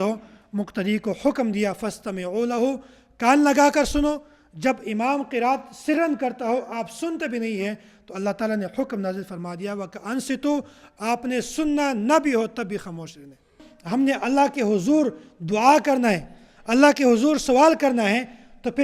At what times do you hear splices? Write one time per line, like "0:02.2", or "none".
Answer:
0:13.7